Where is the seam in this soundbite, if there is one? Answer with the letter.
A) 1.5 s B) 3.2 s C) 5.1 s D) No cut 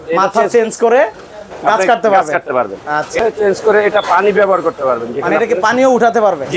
B